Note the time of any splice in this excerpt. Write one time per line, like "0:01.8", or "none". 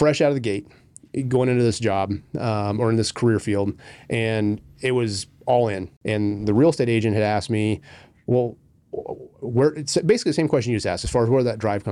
0:05.9